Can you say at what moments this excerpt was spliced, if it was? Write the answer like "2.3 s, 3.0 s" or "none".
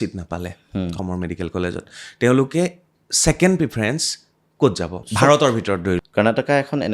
1.0 s, 5.0 s, 6.1 s

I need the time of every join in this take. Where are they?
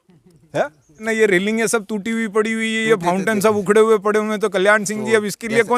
1.0 s

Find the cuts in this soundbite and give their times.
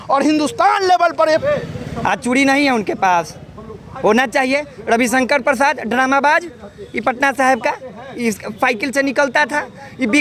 1.4 s

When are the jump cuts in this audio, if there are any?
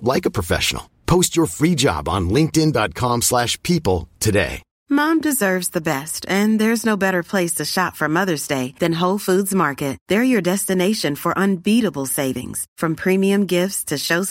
4.7 s

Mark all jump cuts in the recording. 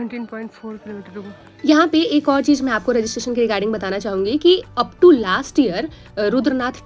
none

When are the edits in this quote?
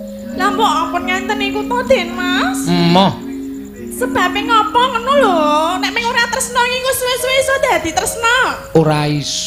none

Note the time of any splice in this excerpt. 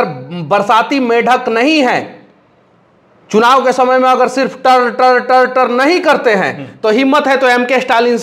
none

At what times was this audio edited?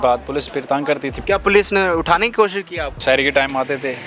1.1 s, 3.0 s

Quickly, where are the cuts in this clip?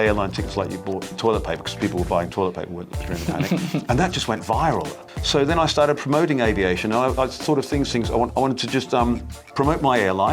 5.1 s, 8.3 s, 9.4 s

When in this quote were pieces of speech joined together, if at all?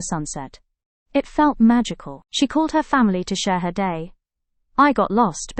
none

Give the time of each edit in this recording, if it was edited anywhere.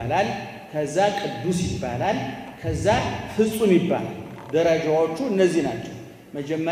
none

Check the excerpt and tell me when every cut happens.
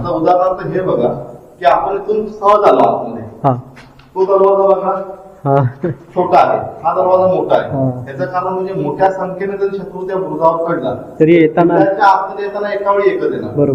none

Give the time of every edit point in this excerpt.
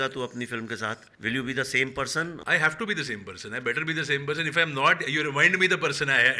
1.1 s, 2.4 s

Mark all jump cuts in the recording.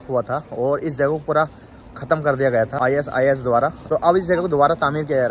2.7 s, 3.8 s

